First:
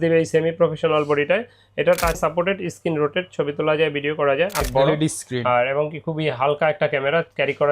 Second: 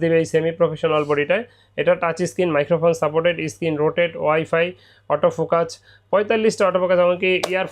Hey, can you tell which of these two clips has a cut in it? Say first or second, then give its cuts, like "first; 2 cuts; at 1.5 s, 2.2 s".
first; 2 cuts; at 2.2 s, 4.7 s